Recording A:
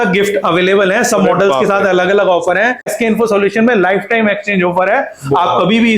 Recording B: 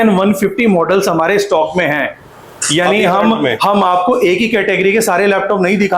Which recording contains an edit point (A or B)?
A